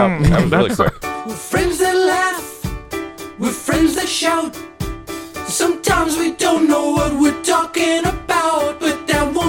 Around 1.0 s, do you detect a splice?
yes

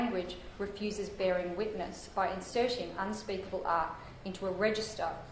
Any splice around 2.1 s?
no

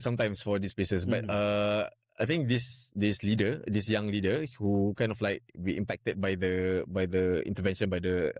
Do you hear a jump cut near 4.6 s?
no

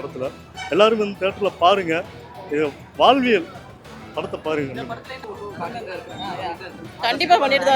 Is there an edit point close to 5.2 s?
yes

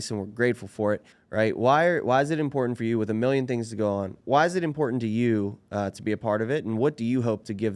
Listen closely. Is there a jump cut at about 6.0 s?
no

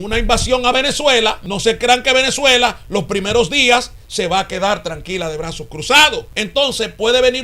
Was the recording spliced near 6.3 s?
yes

